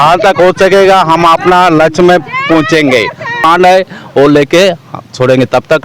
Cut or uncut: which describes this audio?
cut